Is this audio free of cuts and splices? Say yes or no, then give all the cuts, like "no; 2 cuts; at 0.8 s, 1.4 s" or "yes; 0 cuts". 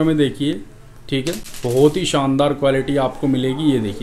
yes; 0 cuts